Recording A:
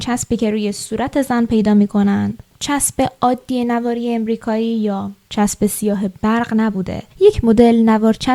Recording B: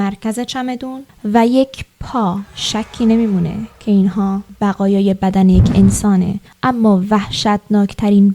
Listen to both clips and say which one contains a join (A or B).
B